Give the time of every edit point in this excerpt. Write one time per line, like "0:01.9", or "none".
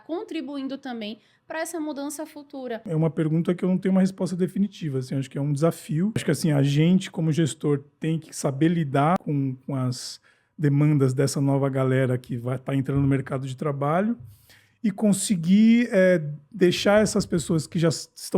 0:02.8
0:06.2
0:09.2